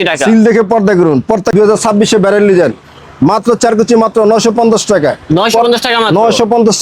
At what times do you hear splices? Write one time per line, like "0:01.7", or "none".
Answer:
0:01.5